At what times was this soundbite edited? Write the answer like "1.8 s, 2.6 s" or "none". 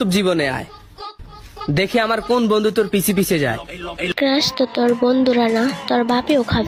none